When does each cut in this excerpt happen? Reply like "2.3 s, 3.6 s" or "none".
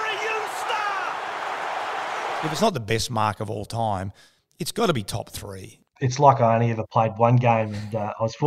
2.5 s, 5.9 s